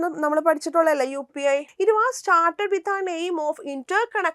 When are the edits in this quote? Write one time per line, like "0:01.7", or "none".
0:01.7